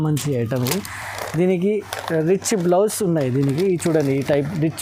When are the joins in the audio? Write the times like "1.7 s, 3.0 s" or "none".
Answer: none